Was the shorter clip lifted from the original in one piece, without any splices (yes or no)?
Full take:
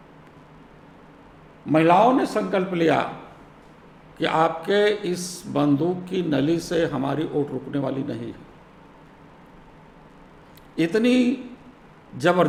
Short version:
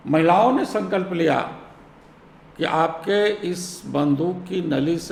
yes